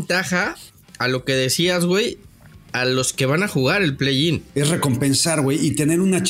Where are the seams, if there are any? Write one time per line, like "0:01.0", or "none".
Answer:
0:04.4